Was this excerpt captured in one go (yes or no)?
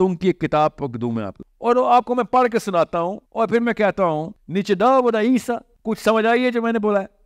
no